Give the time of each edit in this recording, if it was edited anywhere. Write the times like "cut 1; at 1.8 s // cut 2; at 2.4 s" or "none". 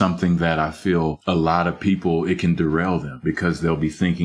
cut 1; at 3.1 s